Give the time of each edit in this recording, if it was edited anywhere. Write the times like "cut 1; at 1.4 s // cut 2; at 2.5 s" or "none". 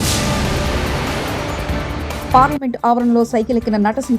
cut 1; at 2.3 s